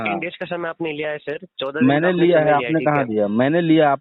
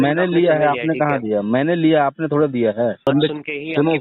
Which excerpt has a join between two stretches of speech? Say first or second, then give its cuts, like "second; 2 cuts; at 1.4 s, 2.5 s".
second; 1 cut; at 3.1 s